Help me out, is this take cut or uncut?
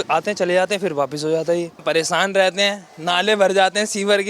cut